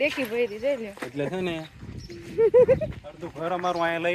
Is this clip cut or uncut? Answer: uncut